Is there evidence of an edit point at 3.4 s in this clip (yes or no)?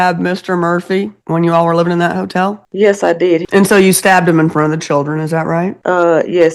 yes